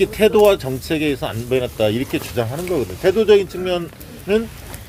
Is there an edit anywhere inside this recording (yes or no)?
no